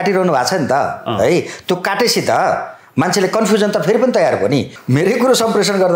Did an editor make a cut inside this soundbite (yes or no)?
yes